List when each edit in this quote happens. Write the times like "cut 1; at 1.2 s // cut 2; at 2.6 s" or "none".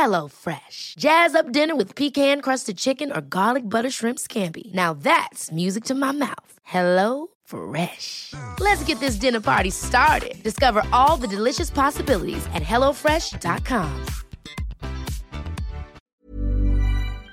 cut 1; at 16.0 s